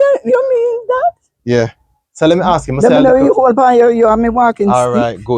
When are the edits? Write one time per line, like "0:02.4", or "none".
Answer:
none